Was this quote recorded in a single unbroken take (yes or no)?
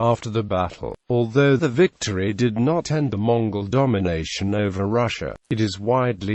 no